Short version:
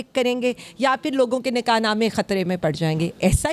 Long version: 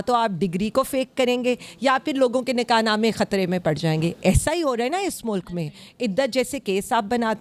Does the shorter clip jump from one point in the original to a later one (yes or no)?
no